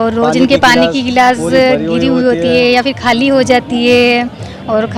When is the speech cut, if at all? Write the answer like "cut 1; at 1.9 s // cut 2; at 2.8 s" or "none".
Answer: none